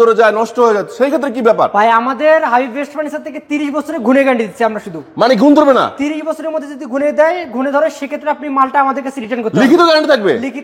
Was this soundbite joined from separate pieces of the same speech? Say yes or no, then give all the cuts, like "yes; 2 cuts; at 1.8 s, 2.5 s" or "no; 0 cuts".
no; 0 cuts